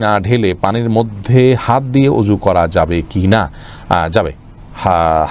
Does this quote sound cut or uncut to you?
uncut